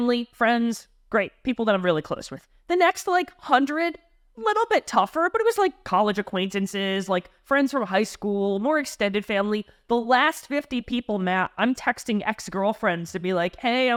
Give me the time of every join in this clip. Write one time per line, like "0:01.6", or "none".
none